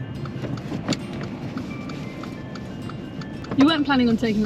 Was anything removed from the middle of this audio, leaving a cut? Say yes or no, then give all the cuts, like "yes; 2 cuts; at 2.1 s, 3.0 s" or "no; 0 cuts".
yes; 1 cut; at 3.4 s